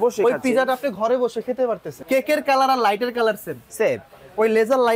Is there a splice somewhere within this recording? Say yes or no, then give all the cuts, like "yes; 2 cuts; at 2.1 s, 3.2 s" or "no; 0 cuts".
yes; 1 cut; at 2.0 s